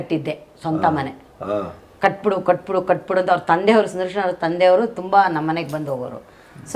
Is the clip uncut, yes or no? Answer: yes